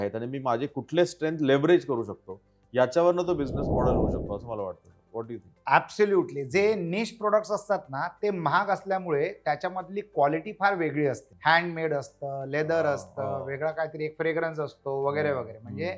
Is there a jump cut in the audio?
yes; 2 cuts; at 5.5 s, 11.3 s

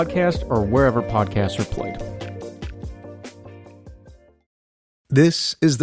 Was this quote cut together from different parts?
yes; 1 cut; at 4.3 s

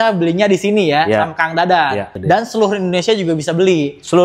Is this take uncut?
no; 1 cut; at 2.1 s

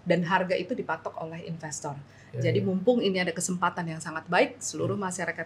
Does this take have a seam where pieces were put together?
no; 0 cuts

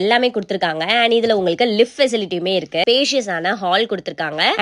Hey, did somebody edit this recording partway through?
yes; 1 cut; at 2.8 s

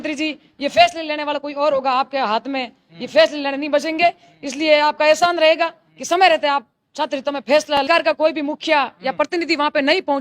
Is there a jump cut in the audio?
yes; 1 cut; at 7.8 s

